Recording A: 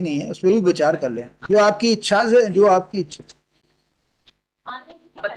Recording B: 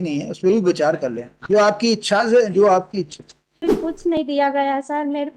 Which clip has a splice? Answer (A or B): B